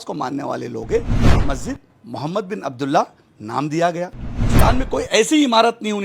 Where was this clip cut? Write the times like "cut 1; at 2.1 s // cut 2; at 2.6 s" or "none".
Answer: cut 1; at 4.5 s